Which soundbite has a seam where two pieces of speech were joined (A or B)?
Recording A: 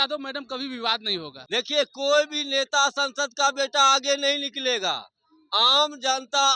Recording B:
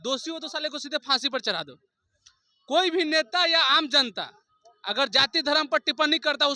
A